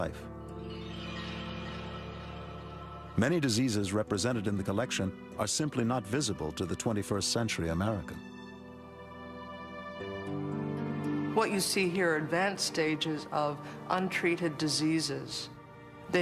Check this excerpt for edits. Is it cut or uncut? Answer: uncut